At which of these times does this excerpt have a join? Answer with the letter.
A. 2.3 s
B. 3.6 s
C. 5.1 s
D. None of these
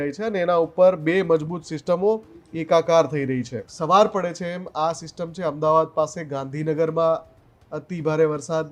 B